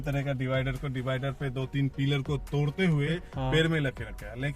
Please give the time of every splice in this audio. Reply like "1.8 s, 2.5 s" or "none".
3.2 s